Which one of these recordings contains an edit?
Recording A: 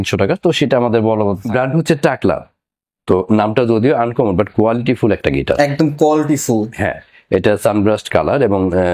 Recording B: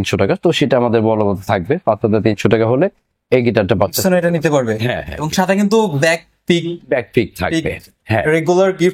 A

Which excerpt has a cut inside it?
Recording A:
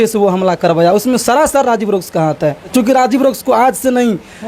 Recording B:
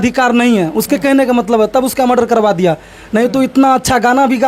A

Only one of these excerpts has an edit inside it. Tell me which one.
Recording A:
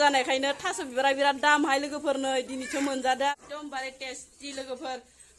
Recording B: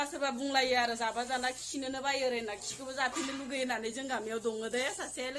A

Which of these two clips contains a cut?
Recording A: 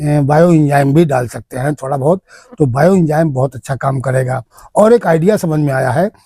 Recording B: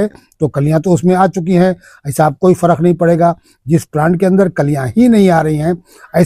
A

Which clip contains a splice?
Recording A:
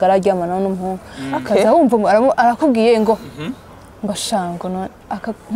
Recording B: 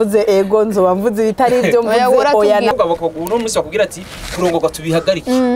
B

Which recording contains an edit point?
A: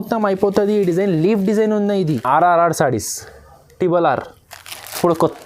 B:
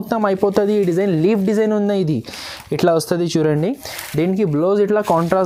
A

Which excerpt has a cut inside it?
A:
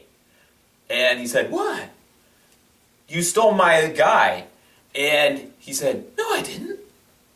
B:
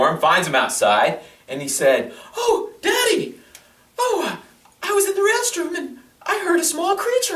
B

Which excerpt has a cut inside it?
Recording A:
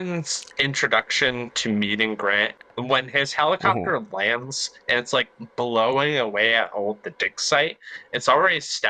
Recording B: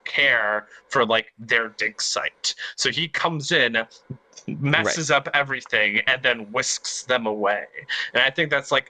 A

